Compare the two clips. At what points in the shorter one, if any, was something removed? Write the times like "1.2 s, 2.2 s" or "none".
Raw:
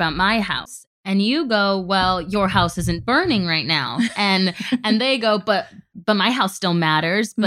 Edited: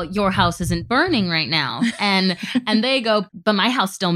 3.3 s